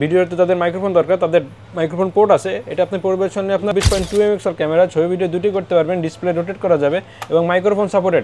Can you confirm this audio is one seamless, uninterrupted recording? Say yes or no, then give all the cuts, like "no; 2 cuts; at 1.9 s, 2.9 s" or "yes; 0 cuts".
no; 1 cut; at 3.7 s